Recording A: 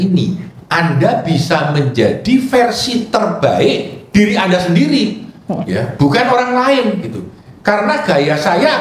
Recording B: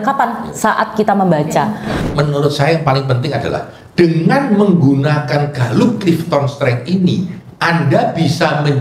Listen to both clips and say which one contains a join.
B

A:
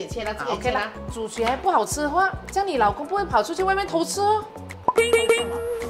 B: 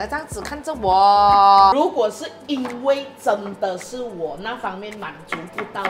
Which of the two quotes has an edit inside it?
B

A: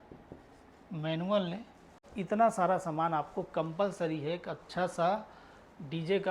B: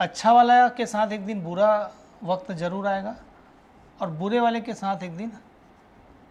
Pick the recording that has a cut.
A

